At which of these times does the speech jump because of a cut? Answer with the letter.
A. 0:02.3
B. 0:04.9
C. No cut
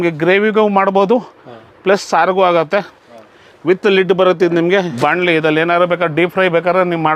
B